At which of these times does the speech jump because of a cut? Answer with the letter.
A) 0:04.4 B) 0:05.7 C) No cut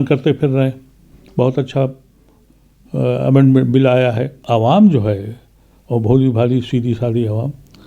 A